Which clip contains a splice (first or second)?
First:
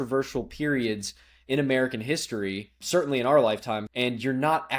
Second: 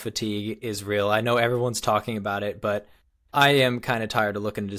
first